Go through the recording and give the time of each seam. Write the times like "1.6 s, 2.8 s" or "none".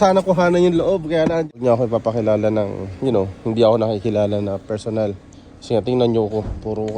1.6 s